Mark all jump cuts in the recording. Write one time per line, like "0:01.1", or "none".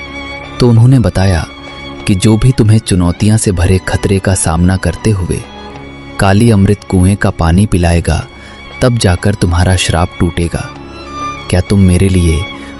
none

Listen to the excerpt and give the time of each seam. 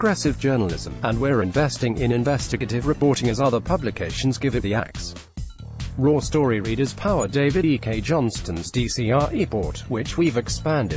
none

